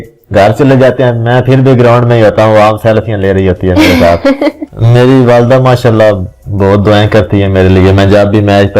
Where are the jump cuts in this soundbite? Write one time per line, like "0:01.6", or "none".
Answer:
0:04.7